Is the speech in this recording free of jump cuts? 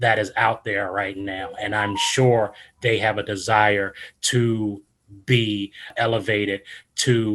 no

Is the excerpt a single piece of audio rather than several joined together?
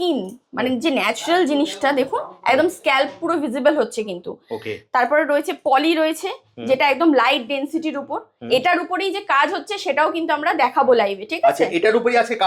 yes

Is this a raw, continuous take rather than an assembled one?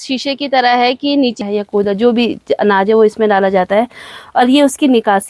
no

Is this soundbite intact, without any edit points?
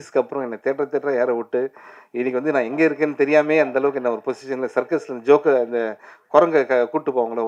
yes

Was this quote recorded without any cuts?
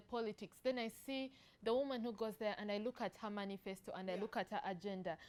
yes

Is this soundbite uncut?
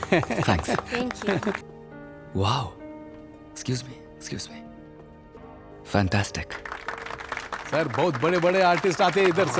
no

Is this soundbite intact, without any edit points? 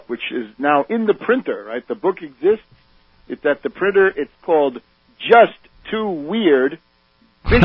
no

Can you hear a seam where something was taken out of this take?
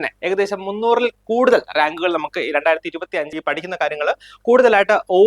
yes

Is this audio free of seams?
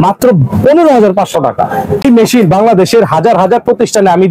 no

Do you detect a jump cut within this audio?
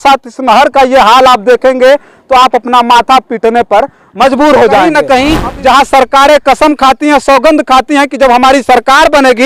yes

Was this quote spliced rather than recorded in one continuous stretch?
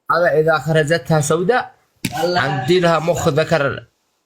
no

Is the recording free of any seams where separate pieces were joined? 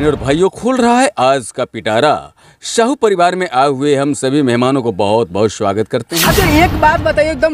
no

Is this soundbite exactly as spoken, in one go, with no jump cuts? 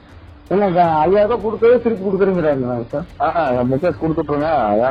yes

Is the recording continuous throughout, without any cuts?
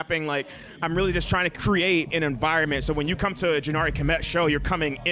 no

